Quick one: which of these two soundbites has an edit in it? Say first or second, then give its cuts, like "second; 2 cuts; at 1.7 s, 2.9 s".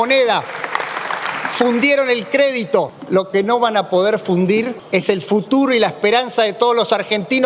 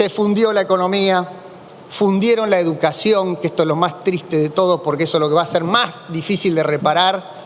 first; 2 cuts; at 3.0 s, 4.8 s